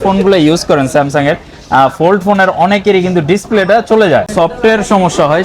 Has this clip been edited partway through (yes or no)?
yes